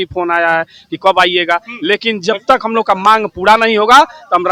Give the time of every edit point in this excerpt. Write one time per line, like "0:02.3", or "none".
none